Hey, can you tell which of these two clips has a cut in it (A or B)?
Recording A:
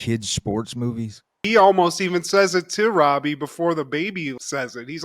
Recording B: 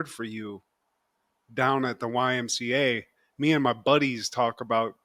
A